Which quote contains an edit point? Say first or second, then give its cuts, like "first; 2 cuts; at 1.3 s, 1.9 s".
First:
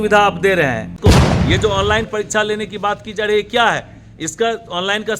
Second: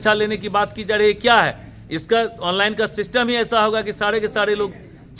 first; 1 cut; at 1.0 s